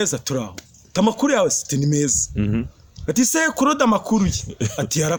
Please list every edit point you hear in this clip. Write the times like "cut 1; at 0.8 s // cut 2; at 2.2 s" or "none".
none